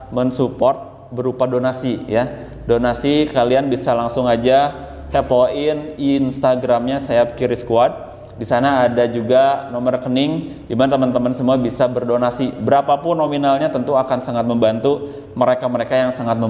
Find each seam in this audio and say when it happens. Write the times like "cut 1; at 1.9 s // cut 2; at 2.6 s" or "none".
none

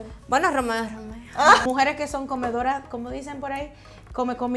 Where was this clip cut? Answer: cut 1; at 1.7 s

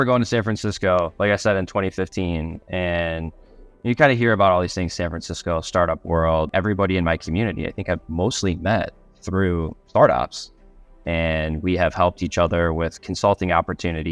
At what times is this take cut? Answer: cut 1; at 6.5 s

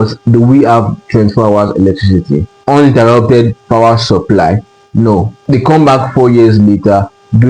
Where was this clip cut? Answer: cut 1; at 2.5 s // cut 2; at 5.3 s

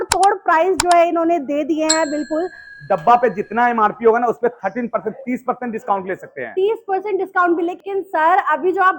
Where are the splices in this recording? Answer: cut 1; at 2.7 s // cut 2; at 7.8 s

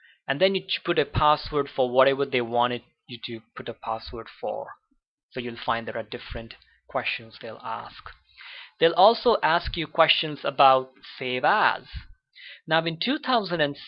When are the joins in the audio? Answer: none

